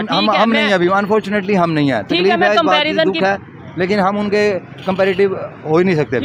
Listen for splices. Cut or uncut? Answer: uncut